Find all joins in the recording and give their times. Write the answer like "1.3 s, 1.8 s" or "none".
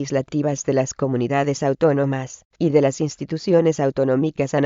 1.9 s